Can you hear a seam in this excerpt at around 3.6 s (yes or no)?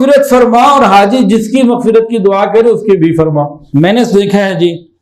yes